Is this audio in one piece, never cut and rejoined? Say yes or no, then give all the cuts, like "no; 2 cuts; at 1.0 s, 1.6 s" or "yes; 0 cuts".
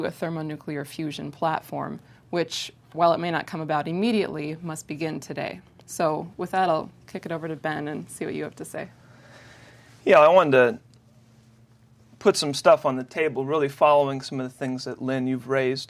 yes; 0 cuts